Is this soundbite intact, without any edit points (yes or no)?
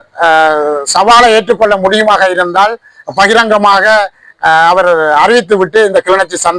yes